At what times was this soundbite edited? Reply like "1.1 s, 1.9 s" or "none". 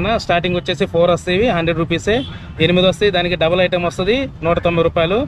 none